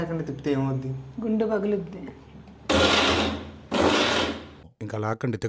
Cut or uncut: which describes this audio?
uncut